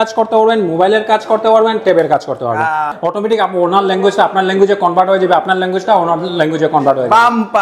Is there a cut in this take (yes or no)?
yes